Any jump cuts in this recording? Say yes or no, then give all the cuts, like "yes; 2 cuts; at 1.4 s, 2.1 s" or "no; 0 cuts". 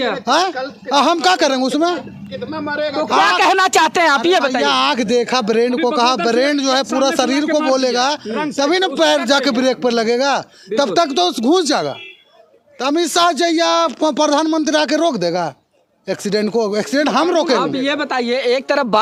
no; 0 cuts